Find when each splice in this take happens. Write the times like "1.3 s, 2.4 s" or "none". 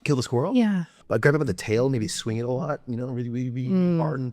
0.9 s

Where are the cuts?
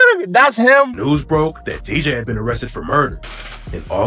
1.0 s

